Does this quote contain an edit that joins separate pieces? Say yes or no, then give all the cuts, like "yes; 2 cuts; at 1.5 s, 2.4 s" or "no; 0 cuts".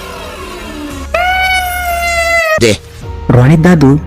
yes; 1 cut; at 2.6 s